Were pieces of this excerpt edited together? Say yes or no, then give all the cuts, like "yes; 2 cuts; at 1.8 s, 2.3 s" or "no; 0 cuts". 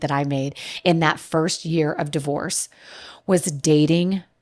no; 0 cuts